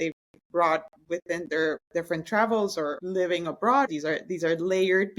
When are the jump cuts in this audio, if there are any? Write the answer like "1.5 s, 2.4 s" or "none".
1.8 s, 3.0 s, 3.9 s